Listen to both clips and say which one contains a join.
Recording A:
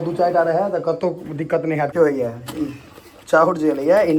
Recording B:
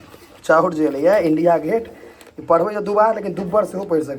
A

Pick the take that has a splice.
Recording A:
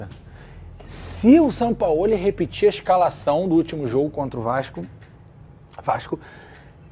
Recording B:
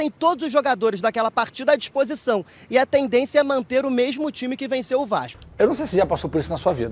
B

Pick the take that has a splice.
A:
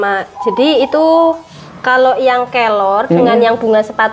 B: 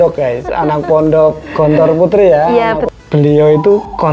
B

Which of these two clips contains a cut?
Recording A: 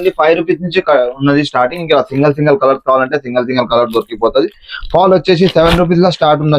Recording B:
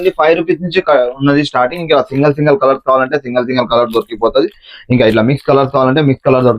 A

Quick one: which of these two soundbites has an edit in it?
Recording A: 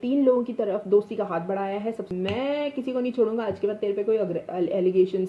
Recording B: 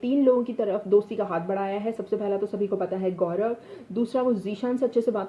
A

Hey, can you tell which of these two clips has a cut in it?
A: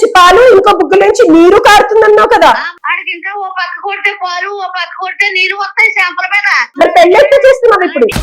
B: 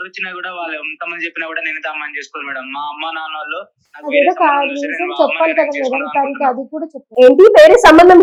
A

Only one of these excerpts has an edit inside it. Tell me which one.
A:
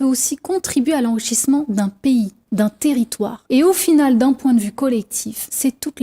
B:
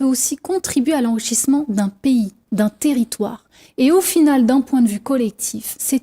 A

